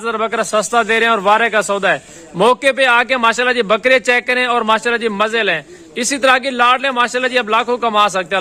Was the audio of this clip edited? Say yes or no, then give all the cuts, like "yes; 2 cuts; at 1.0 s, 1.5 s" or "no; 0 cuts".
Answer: no; 0 cuts